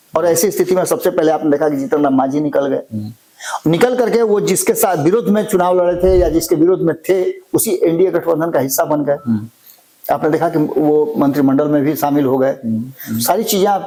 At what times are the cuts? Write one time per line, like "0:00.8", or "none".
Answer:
none